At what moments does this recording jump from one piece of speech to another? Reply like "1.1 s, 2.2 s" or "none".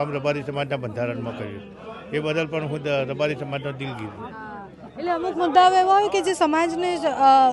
none

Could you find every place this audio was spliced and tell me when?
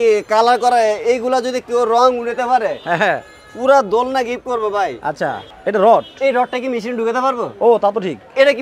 5.4 s

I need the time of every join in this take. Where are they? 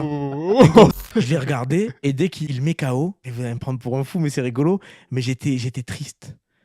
0.9 s, 2.4 s, 3.3 s

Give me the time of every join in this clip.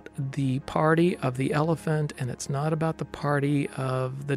none

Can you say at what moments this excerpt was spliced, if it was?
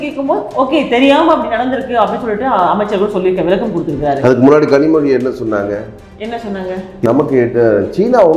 7.0 s

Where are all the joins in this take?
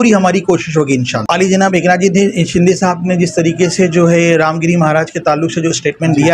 1.2 s

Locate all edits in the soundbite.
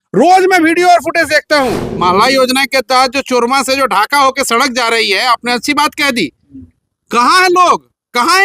1.8 s

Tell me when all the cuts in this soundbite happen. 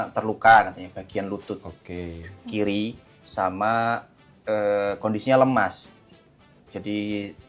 none

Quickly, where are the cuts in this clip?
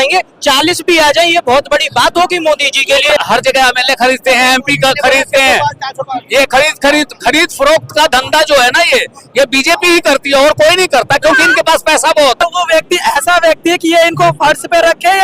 3.2 s, 12.4 s

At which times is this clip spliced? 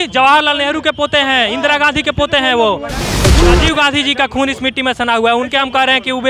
3.2 s

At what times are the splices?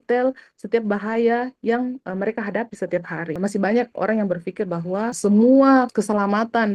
3.3 s, 5.1 s, 5.9 s

